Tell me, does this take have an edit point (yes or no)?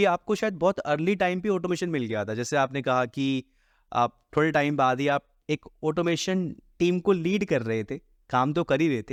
no